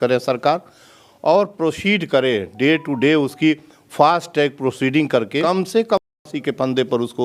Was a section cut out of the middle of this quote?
no; 0 cuts

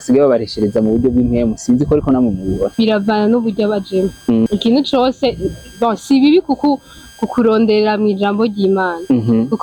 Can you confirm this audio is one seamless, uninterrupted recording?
no; 2 cuts; at 2.7 s, 4.5 s

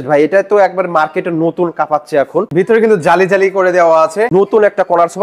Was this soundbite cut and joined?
yes; 2 cuts; at 2.5 s, 4.3 s

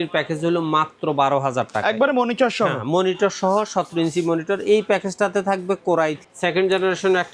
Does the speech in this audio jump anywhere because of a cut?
no; 0 cuts

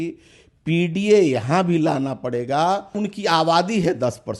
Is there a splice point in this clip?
yes; 1 cut; at 3.0 s

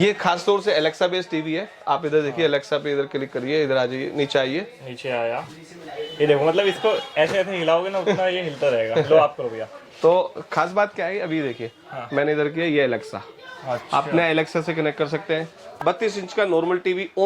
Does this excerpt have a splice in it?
yes; 1 cut; at 15.6 s

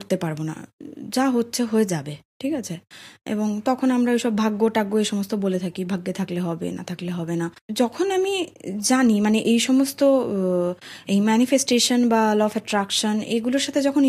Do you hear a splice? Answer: yes; 1 cut; at 7.6 s

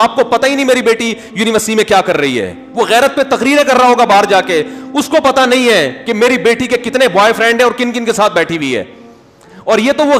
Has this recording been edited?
no; 0 cuts

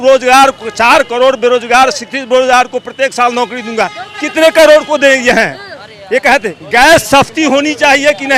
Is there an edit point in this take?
no; 0 cuts

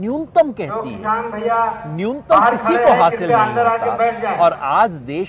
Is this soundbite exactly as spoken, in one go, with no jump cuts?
yes; 0 cuts

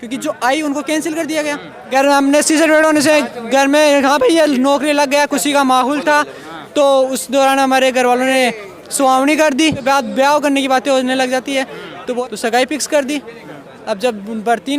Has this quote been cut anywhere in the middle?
yes; 3 cuts; at 2.0 s, 9.8 s, 12.2 s

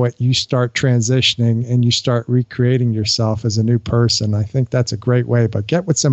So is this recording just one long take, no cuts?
yes; 0 cuts

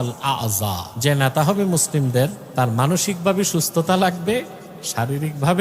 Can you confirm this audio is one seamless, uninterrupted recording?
no; 2 cuts; at 0.9 s, 2.4 s

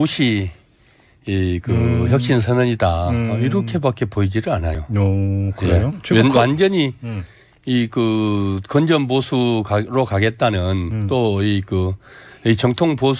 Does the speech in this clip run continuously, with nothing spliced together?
no; 1 cut; at 3.4 s

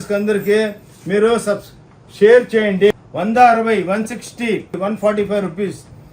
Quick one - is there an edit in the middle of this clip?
yes; 2 cuts; at 2.9 s, 4.8 s

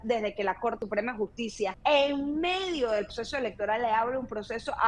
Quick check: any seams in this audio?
yes; 3 cuts; at 0.8 s, 1.8 s, 3.1 s

